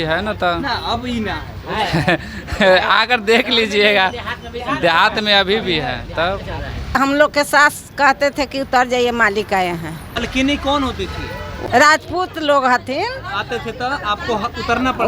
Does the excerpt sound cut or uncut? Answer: cut